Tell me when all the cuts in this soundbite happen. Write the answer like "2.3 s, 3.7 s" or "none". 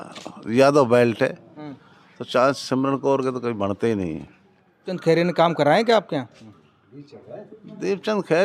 4.9 s

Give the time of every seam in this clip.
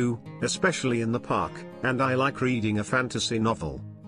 none

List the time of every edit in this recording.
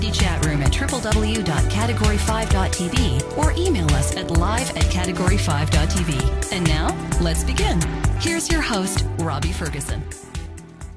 8.0 s

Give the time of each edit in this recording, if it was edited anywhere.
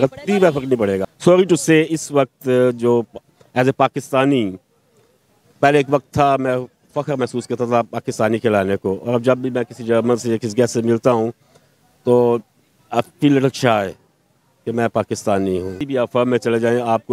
15.8 s

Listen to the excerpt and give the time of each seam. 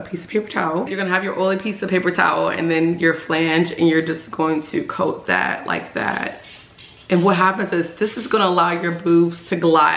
0.9 s

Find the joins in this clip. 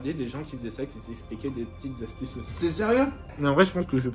3.2 s

